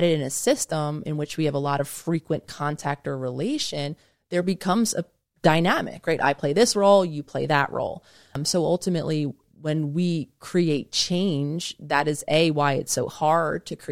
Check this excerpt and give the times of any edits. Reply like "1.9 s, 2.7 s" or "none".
8.4 s, 9.4 s